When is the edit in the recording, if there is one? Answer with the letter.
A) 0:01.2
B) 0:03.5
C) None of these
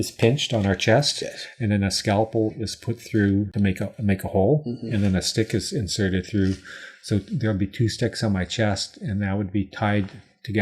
B